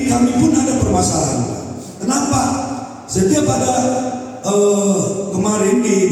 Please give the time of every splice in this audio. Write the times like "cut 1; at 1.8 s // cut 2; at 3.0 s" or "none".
none